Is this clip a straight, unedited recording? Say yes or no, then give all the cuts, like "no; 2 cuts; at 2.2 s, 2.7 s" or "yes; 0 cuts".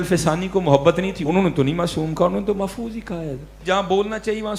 no; 2 cuts; at 1.2 s, 3.6 s